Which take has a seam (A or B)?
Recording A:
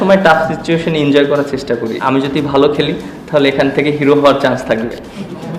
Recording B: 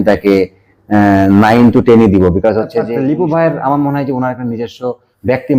B